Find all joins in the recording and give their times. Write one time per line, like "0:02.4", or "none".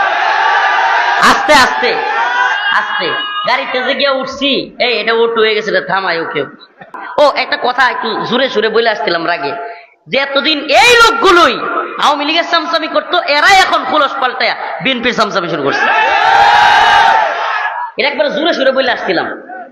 0:06.9